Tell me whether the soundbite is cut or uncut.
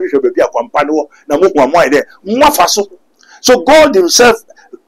uncut